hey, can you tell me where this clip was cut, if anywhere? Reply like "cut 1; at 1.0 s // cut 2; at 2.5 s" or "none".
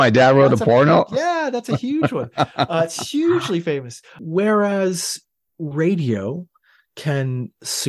cut 1; at 4.2 s